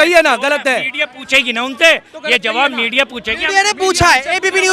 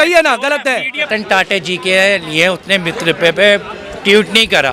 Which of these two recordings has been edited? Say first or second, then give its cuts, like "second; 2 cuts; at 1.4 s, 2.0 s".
second; 1 cut; at 1.1 s